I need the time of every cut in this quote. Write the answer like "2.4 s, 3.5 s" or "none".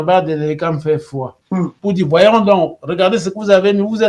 1.7 s